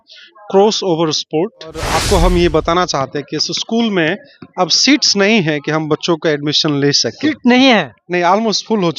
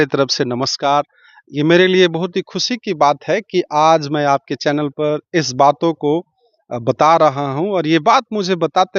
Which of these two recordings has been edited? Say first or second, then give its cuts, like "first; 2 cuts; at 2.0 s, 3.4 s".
first; 1 cut; at 1.9 s